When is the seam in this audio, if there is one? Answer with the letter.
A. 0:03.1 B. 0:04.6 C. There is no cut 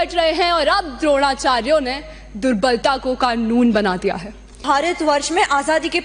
B